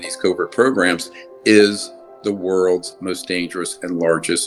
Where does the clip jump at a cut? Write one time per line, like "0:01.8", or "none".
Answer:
none